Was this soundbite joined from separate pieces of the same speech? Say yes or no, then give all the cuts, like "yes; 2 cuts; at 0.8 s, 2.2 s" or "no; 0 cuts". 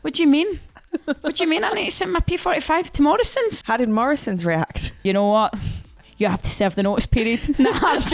yes; 2 cuts; at 3.6 s, 4.9 s